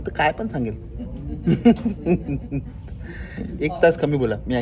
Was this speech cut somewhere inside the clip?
no; 0 cuts

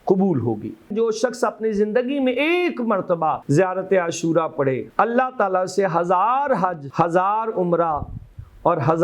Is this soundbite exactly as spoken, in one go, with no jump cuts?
no; 4 cuts; at 0.9 s, 3.4 s, 4.8 s, 6.8 s

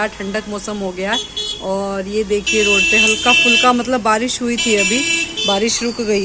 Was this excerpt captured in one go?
yes; 0 cuts

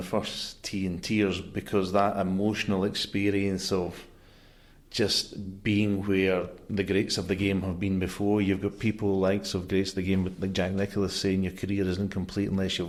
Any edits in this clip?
no; 0 cuts

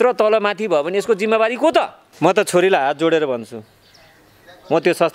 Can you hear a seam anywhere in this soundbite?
yes; 1 cut; at 2.0 s

